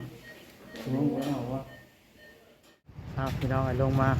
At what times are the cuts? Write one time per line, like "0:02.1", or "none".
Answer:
0:03.0